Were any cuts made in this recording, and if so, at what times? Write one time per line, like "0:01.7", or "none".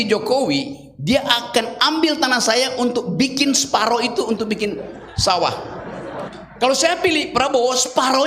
0:06.2